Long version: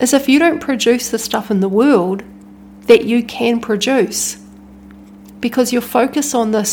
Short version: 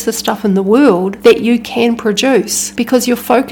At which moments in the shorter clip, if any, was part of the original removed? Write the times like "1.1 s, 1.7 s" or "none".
1.1 s, 2.6 s

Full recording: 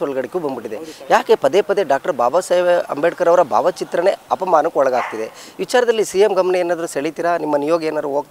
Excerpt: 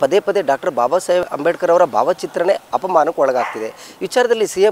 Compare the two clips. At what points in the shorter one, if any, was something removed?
1.2 s

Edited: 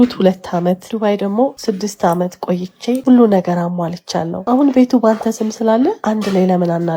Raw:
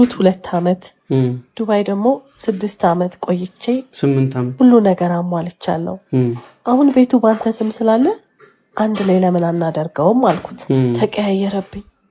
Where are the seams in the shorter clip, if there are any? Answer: 0.9 s, 1.6 s, 3.0 s, 4.3 s, 6.0 s

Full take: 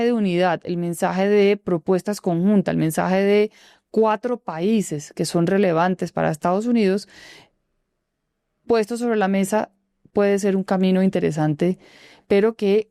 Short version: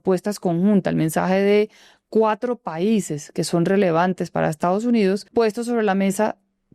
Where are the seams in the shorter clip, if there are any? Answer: 5.3 s

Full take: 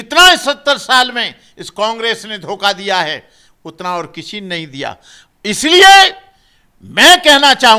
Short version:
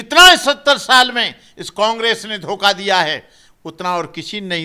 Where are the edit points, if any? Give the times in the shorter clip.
none

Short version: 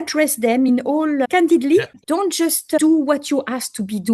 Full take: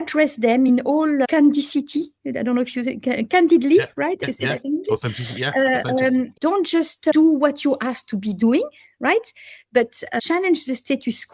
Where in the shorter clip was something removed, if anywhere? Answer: 1.3 s, 2.0 s

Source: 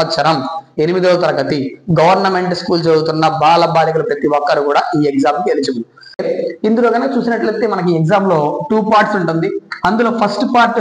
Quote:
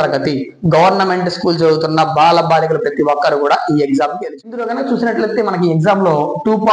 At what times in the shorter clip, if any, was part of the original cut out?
4.6 s

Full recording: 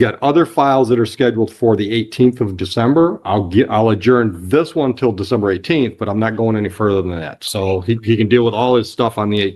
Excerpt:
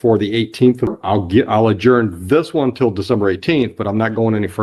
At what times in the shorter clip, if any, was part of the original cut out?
1.0 s

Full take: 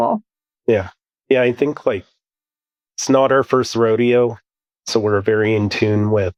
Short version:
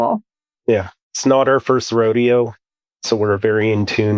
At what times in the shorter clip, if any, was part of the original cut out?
1.0 s

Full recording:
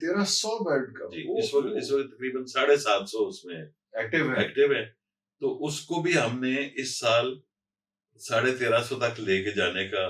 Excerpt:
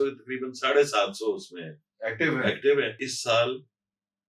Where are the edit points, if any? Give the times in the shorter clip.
3.1 s

